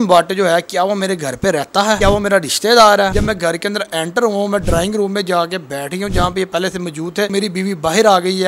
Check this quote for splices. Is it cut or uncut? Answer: cut